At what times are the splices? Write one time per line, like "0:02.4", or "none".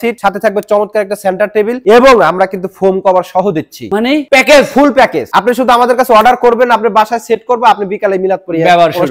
none